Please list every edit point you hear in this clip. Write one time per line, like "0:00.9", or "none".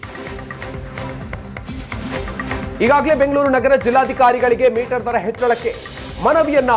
0:02.7